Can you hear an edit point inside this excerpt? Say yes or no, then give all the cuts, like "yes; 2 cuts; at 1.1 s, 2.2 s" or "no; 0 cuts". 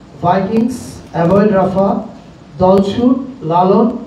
no; 0 cuts